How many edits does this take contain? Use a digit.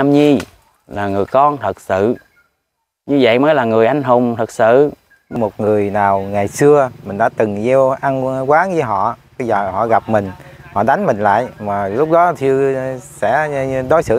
1